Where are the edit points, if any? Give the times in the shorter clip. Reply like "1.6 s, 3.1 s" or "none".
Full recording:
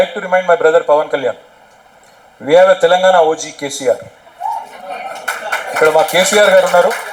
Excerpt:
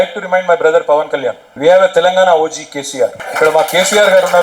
1.5 s, 3.2 s

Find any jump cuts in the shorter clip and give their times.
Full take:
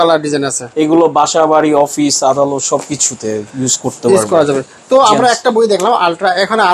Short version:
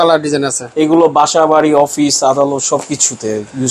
none

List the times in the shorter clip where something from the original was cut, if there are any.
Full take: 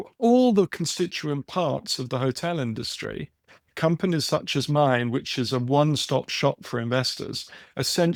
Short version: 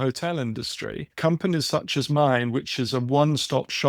1.1 s

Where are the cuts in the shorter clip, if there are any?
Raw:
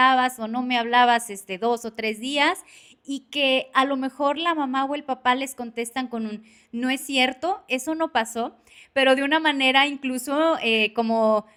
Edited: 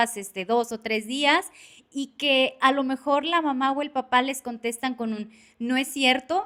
none

